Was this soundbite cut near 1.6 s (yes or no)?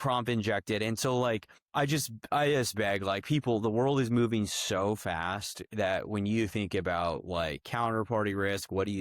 yes